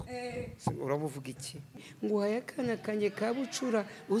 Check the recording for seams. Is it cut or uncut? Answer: cut